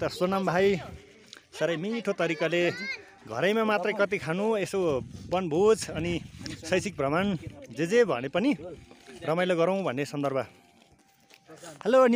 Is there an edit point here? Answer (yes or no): no